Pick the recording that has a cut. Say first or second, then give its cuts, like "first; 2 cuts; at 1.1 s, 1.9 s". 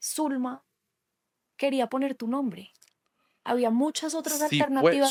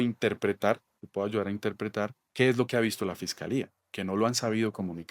second; 1 cut; at 2.2 s